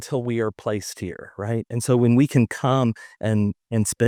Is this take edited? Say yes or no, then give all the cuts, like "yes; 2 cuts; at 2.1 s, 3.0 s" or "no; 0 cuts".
no; 0 cuts